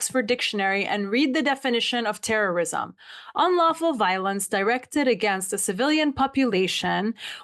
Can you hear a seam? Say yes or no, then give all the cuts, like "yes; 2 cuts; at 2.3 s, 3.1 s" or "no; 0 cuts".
no; 0 cuts